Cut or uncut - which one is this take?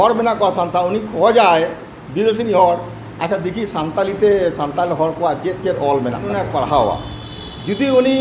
cut